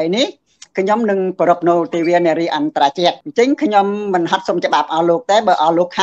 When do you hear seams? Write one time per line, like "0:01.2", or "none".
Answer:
0:03.2